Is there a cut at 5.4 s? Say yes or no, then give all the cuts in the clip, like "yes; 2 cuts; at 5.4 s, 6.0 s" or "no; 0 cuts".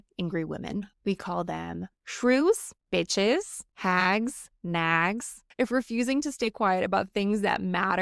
yes; 5 cuts; at 0.9 s, 2.7 s, 3.6 s, 4.5 s, 5.4 s